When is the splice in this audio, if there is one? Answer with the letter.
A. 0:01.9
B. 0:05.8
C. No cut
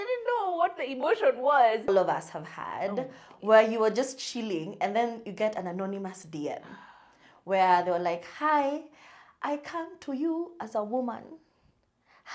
A